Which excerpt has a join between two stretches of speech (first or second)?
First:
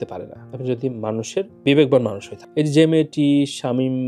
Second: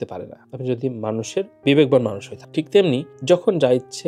first